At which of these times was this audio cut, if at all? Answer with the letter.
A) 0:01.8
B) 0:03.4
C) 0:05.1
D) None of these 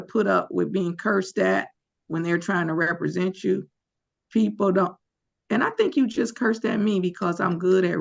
D